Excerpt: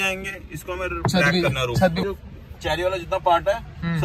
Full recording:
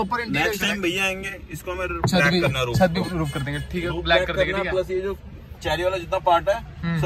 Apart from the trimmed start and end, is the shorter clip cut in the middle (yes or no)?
yes